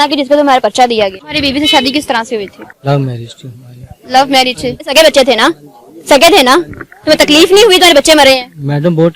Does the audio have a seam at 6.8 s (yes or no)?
no